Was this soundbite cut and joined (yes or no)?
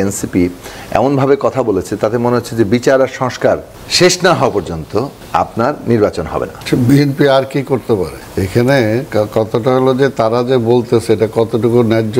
yes